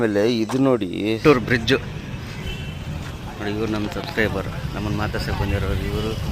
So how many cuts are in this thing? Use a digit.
1